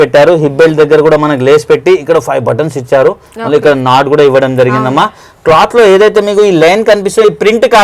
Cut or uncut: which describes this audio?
uncut